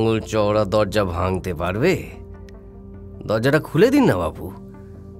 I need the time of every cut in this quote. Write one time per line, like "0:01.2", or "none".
none

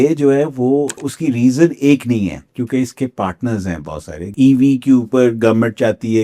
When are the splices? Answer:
0:01.1
0:04.3

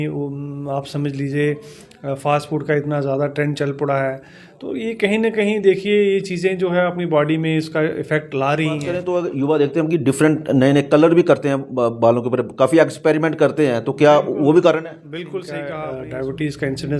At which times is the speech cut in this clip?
0:09.0
0:15.7

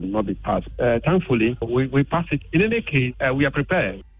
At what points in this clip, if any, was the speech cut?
0:03.1

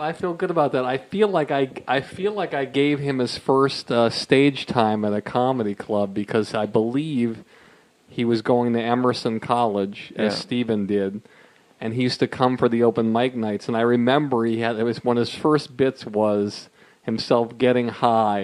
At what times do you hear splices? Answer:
0:07.0

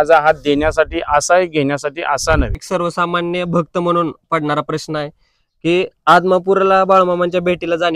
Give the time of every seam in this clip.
0:02.6

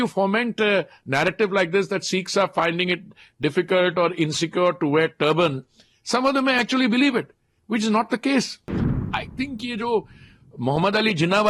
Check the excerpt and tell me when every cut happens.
0:09.0

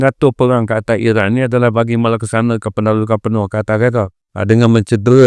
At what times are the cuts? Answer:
0:04.2

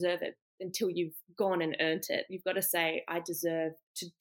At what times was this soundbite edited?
none

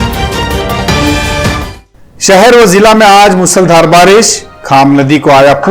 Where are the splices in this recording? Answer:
0:01.8

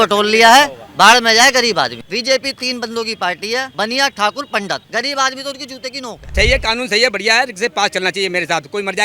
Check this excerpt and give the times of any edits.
0:02.0
0:03.7
0:04.8
0:06.3

